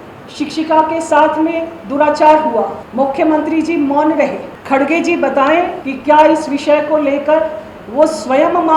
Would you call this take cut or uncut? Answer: cut